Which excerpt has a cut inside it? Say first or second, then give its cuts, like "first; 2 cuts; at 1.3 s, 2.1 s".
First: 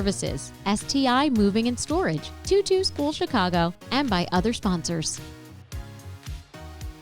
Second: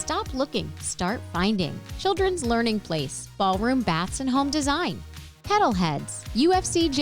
first; 1 cut; at 5.1 s